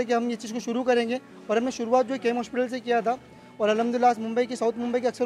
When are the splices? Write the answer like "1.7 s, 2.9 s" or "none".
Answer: none